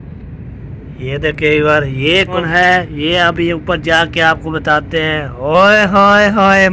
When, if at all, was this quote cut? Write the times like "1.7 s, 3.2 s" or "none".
2.3 s